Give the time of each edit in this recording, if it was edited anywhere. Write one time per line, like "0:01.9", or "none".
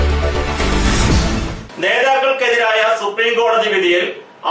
0:01.5